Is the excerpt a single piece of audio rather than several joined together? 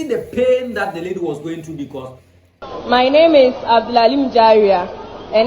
no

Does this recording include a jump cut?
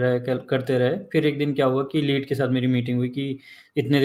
no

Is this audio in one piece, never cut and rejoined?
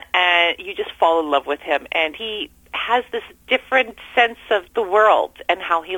no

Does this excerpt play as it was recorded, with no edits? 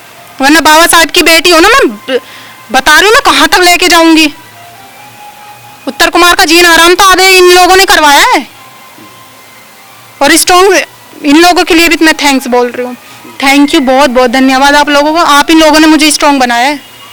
yes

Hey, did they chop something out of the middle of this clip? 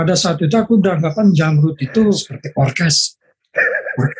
yes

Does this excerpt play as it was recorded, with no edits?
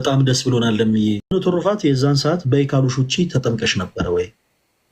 no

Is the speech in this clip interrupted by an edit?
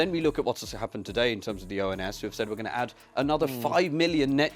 no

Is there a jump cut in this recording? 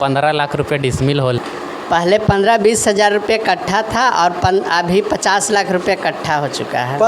yes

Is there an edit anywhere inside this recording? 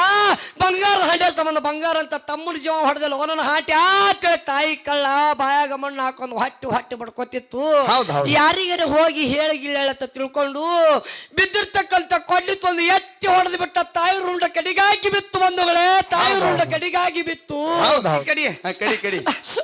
yes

